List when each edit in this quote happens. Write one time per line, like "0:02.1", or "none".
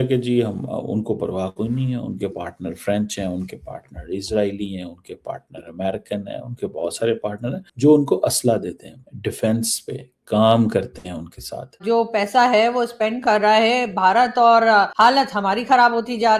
0:11.8